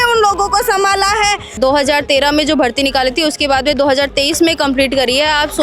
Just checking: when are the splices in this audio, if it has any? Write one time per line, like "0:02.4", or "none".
0:01.5

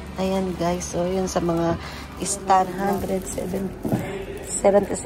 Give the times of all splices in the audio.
0:02.7

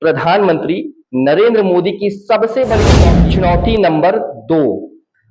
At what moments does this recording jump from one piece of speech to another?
0:02.9

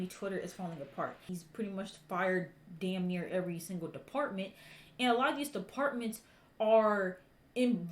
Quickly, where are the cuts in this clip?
0:01.3

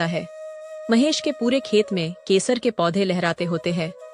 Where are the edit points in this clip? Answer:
none

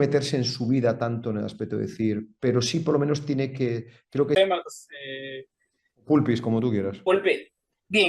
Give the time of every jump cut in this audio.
0:04.4

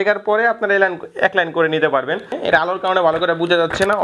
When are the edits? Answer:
0:02.3

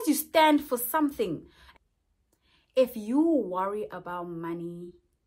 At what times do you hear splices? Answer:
0:01.6

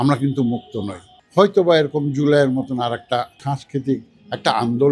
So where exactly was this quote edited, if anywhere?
0:01.2
0:03.3

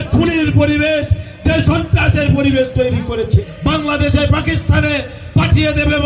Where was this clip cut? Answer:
0:03.4

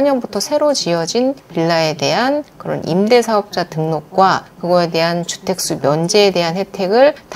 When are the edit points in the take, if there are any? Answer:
none

